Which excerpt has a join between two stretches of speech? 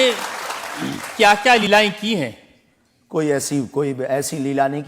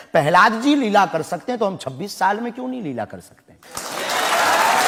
first; 1 cut; at 1.7 s

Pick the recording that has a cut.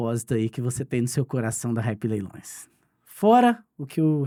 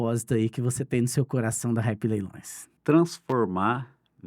second; 1 cut; at 2.8 s

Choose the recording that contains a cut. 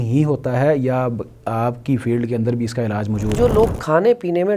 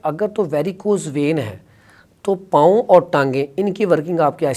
first; 1 cut; at 3.4 s

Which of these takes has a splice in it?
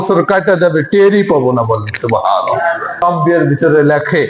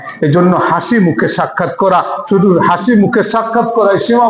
first; 1 cut; at 3.0 s

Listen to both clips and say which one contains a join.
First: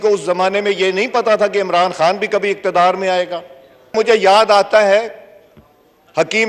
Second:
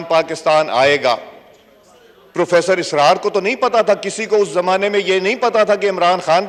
first; 1 cut; at 3.8 s

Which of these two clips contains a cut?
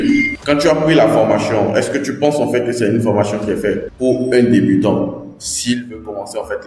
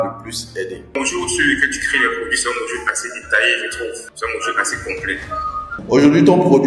second; 3 cuts; at 0.9 s, 4.1 s, 5.8 s

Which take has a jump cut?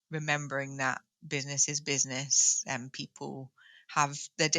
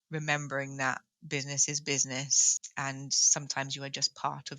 second; 1 cut; at 2.5 s

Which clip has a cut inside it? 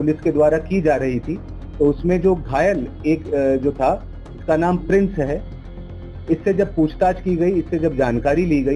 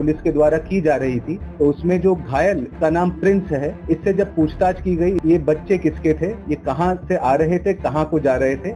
second; 5 cuts; at 1.4 s, 2.7 s, 3.8 s, 5.2 s, 6.5 s

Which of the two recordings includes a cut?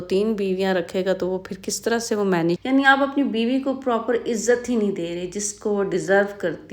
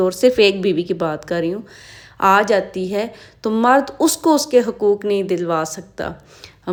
first; 1 cut; at 2.6 s

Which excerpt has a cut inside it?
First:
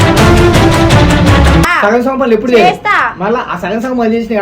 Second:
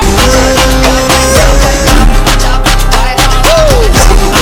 first; 1 cut; at 1.7 s

